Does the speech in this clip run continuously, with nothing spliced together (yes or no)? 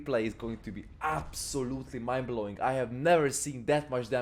yes